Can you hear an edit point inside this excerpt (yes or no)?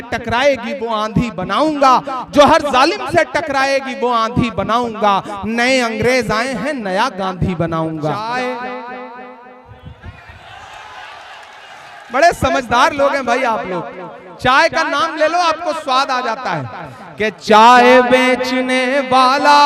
yes